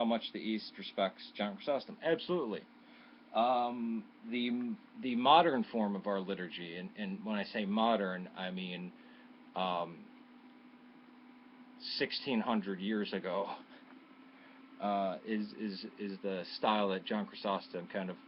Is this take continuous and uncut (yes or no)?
no